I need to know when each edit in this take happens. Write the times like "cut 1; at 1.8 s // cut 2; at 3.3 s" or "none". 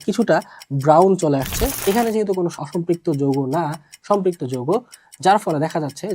cut 1; at 1.8 s // cut 2; at 2.6 s